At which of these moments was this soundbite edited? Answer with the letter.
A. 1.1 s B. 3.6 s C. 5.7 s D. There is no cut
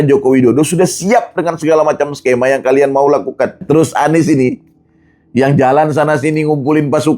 B